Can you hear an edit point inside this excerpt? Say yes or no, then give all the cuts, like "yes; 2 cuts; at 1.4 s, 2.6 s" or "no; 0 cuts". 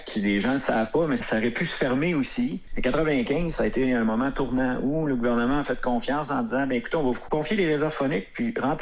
yes; 3 cuts; at 1.2 s, 2.7 s, 7.2 s